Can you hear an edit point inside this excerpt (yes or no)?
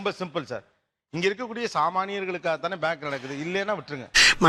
no